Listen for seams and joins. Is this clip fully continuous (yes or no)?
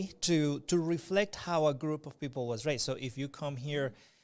yes